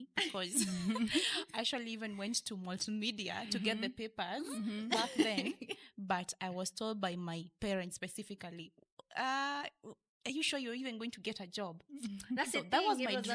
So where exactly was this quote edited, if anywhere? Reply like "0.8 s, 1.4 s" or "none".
none